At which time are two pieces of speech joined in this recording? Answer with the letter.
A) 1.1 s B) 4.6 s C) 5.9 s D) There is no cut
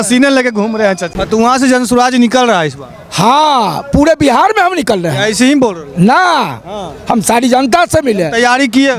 A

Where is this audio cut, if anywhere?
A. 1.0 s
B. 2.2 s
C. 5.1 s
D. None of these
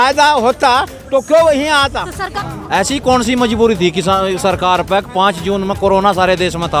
B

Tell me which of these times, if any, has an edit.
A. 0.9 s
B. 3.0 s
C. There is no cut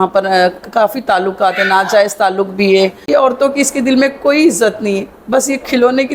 B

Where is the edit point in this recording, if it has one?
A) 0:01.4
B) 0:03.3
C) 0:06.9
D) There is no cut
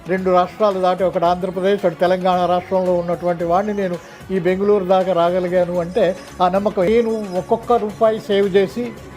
C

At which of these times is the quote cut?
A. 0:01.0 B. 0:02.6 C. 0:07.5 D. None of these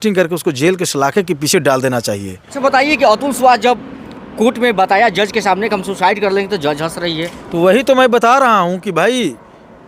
B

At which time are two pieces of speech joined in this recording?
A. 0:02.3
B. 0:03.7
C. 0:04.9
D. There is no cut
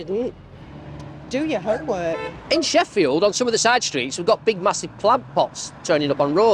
A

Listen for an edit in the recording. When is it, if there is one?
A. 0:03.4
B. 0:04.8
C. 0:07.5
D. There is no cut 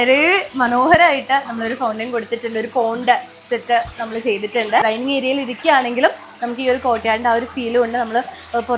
B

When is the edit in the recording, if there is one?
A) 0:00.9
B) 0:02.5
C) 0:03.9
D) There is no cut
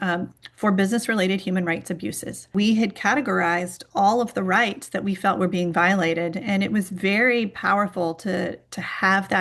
B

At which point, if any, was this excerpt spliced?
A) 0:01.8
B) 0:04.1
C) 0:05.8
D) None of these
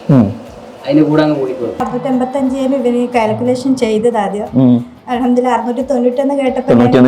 A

